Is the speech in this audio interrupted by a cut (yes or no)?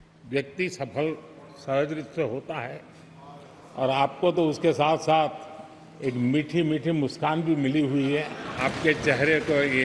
yes